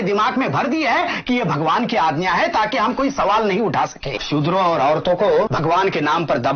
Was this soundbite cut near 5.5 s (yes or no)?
yes